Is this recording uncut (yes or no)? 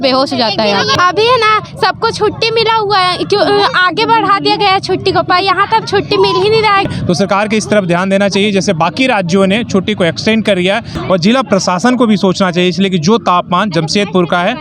no